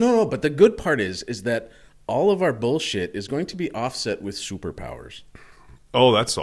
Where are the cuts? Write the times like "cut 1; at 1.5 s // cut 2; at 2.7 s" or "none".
none

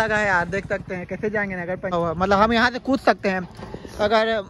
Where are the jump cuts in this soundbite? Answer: cut 1; at 1.9 s

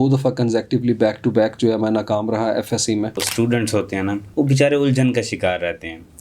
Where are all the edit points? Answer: cut 1; at 3.2 s // cut 2; at 4.2 s

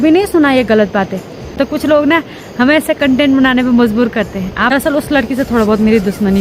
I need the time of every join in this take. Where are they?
cut 1; at 1.5 s // cut 2; at 4.7 s

